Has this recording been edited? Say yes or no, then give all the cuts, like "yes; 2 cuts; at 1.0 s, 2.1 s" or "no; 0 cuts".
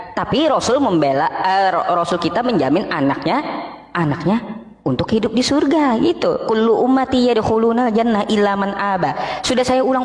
no; 0 cuts